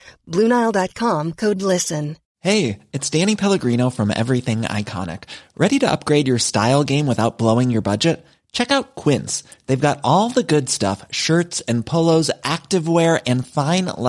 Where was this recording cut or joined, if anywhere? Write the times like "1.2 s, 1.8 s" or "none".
2.2 s